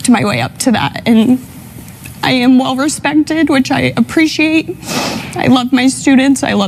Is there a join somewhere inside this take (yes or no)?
no